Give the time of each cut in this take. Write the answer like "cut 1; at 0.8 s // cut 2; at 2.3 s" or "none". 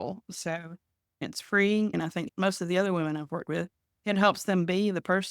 cut 1; at 1.2 s // cut 2; at 2.2 s